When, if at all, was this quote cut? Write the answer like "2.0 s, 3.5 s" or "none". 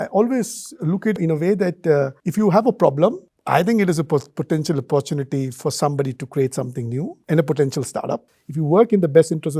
1.2 s, 7.2 s, 8.3 s